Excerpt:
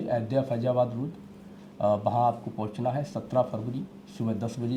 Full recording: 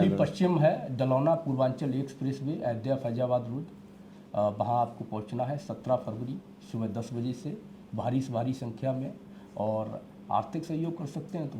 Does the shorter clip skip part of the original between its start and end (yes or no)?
no